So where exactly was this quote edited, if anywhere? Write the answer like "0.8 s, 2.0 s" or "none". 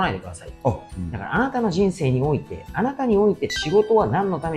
0.9 s